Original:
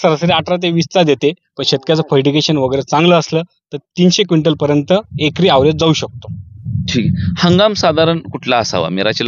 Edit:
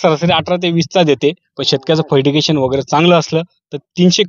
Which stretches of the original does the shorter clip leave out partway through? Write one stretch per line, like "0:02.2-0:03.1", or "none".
none